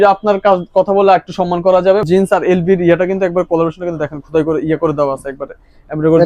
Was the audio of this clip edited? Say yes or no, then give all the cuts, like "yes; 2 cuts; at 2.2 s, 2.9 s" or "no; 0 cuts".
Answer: yes; 1 cut; at 2.0 s